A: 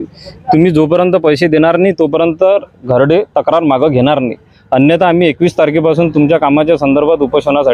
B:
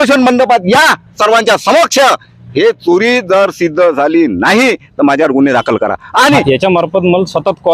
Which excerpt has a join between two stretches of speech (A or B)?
B